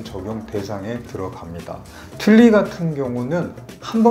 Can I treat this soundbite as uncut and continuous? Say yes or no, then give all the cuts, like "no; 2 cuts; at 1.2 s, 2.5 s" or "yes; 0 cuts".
no; 1 cut; at 2.2 s